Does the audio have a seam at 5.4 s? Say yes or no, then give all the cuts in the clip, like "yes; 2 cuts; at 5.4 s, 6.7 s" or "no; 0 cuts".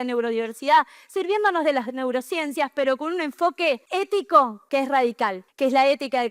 yes; 3 cuts; at 3.8 s, 4.6 s, 5.4 s